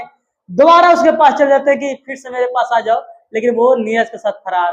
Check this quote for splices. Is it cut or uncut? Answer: uncut